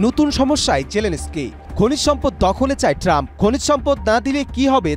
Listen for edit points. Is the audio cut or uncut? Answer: uncut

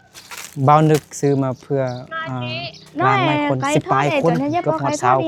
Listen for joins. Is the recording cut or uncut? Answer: uncut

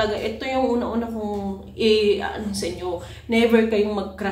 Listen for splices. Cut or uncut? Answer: uncut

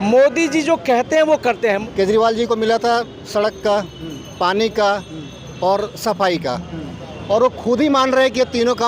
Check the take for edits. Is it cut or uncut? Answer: cut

